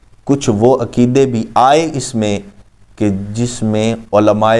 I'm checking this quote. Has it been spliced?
no; 0 cuts

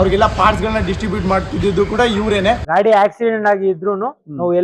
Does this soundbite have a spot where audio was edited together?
yes; 1 cut; at 2.6 s

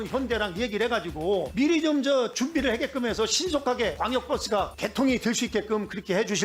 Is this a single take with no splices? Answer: yes; 0 cuts

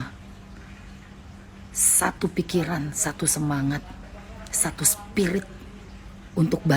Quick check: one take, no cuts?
yes; 0 cuts

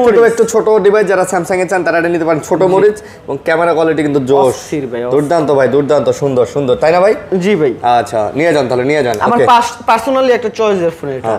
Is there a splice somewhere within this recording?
no; 0 cuts

